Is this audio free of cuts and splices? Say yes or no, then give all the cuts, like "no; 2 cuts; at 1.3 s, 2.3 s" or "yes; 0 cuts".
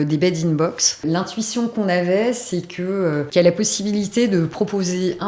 no; 2 cuts; at 1.0 s, 3.3 s